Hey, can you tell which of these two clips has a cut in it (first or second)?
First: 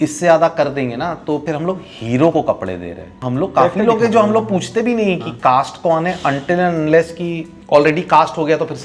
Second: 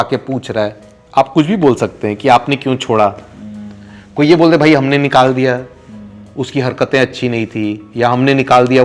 first